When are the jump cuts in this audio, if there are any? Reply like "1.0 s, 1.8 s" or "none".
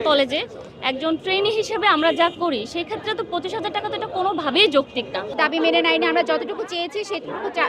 5.3 s